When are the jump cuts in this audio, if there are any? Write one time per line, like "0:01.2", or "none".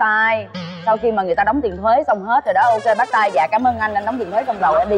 none